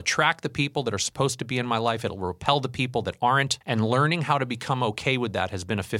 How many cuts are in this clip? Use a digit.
1